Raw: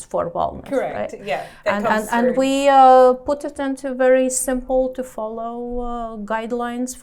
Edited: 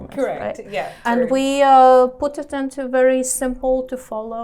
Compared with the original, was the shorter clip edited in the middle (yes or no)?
yes